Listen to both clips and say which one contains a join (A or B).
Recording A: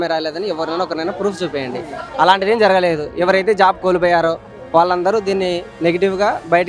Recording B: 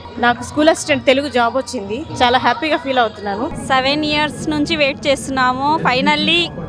B